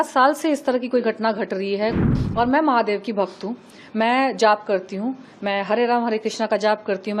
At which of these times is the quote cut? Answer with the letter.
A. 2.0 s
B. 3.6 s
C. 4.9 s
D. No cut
A